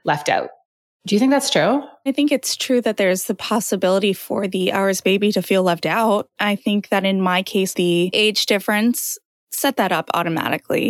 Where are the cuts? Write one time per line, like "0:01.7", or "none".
0:02.1
0:06.3
0:07.7